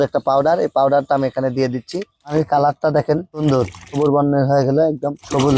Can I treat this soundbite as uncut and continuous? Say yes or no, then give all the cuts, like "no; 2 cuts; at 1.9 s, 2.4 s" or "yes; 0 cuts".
no; 1 cut; at 2.1 s